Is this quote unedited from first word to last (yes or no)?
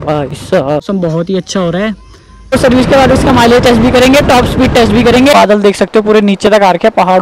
no